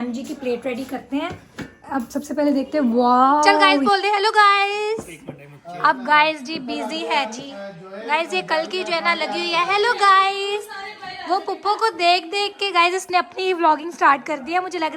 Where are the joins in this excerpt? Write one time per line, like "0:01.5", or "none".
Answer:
0:03.7